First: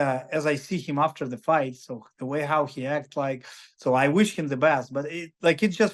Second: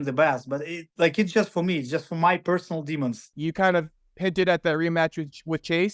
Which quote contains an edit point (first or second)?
second